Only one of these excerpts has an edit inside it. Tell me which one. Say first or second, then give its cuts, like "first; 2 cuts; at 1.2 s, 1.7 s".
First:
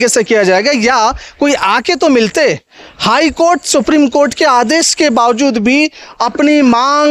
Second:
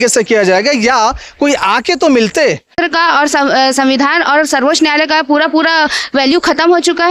second; 1 cut; at 2.8 s